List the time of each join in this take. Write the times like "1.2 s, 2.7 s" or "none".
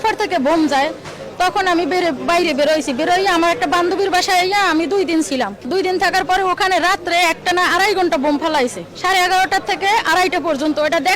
none